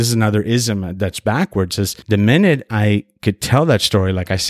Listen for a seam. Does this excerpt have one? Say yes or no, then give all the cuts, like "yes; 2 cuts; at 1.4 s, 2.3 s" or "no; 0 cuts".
yes; 1 cut; at 2.0 s